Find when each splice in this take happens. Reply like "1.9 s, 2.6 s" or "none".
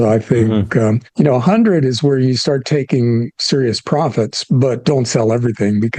none

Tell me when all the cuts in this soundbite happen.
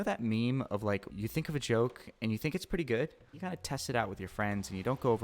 1.1 s, 3.3 s

